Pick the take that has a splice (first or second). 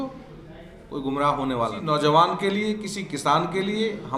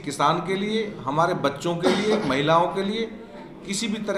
first